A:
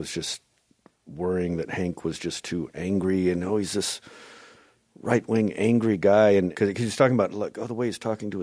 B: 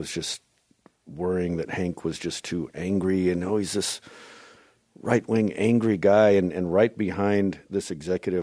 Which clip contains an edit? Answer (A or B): A